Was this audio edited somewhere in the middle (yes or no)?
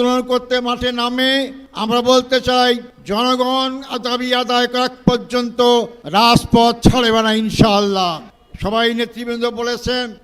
yes